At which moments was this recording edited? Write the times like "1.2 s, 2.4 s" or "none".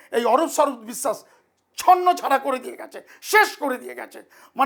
none